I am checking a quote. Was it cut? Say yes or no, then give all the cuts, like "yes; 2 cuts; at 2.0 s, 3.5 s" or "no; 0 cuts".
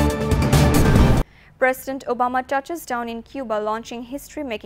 yes; 1 cut; at 1.1 s